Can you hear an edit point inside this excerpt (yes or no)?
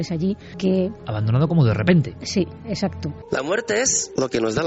yes